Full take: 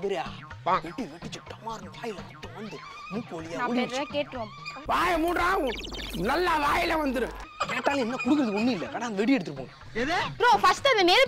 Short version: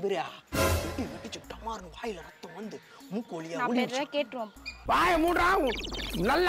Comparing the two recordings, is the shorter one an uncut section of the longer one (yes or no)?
yes